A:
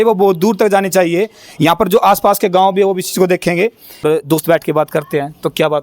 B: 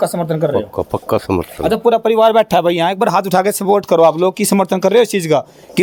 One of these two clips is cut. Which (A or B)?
A